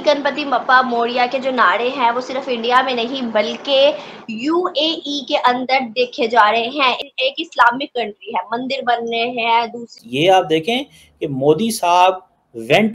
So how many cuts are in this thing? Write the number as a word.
one